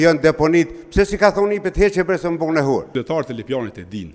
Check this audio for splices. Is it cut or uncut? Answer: cut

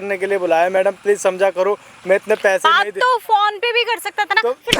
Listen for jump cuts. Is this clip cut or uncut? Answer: uncut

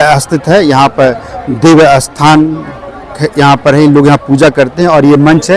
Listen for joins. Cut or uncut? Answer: uncut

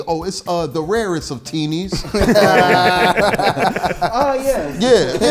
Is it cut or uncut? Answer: uncut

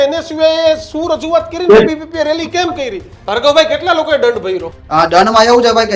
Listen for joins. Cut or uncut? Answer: cut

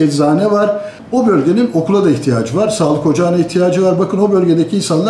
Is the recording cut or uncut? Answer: cut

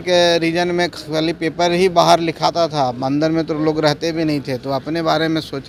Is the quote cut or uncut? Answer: uncut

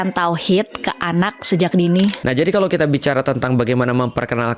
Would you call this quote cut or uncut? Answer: cut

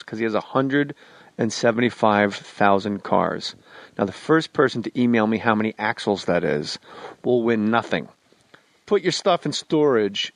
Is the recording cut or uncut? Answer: cut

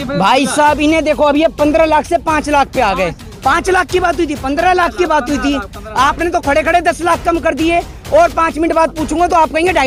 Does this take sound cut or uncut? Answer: uncut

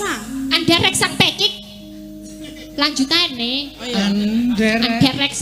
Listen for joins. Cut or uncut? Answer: uncut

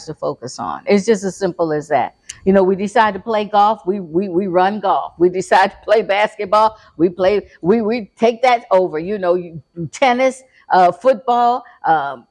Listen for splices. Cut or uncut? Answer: uncut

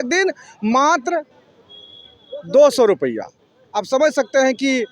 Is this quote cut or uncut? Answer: uncut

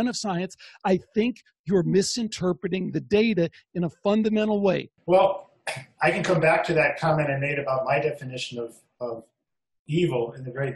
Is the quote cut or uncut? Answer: cut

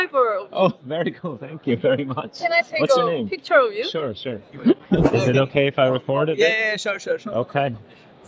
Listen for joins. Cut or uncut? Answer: uncut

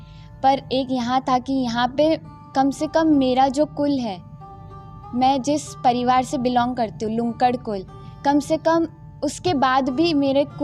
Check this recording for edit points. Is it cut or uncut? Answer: uncut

